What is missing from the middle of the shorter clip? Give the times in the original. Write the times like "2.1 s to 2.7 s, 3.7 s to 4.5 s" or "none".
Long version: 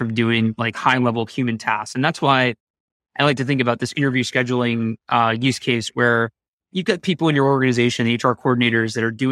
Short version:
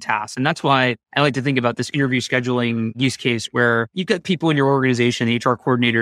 2.6 s to 3.1 s, 5.0 s to 5.4 s, 6.4 s to 6.7 s

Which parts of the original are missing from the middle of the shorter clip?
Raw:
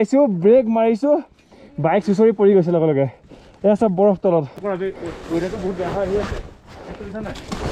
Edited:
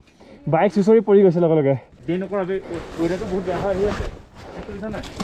3.5 s to 4.5 s

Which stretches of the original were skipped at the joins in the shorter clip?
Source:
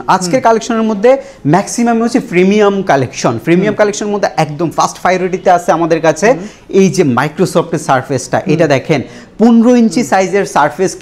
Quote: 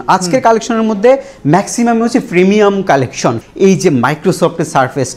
3.4 s to 6.5 s

